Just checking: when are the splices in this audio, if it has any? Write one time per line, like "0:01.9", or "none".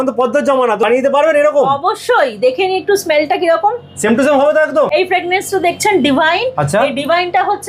0:00.9
0:04.9

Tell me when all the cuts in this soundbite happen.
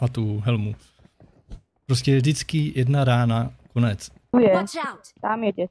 0:04.3

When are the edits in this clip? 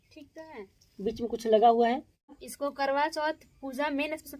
0:02.5

